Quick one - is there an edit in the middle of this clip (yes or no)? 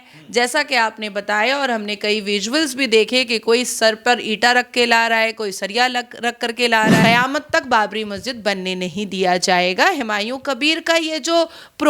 yes